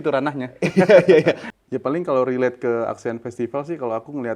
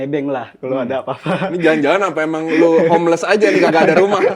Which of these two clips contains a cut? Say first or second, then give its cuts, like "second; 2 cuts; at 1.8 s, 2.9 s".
first; 1 cut; at 1.4 s